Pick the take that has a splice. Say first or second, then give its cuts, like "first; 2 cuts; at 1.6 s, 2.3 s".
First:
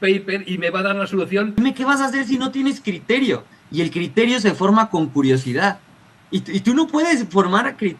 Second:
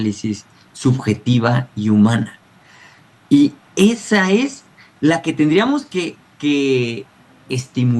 first; 1 cut; at 1.6 s